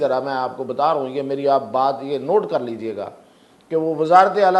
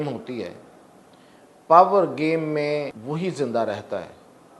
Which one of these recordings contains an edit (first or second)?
second